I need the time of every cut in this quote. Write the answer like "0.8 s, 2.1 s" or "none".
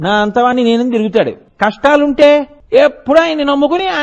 1.4 s, 2.6 s